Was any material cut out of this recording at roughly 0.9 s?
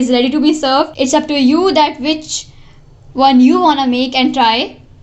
yes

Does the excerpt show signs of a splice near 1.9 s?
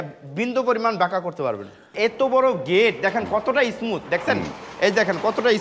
yes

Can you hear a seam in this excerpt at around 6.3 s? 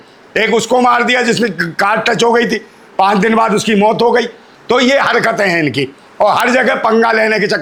no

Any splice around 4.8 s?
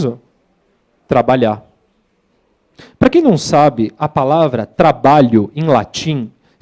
yes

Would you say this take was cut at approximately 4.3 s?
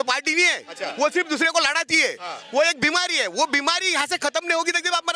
no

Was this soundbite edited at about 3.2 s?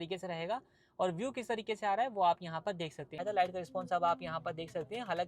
yes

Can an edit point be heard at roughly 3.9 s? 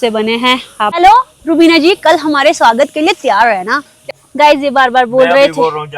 yes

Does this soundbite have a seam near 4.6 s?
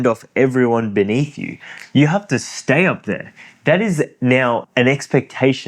yes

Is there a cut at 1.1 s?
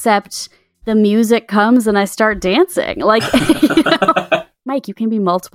no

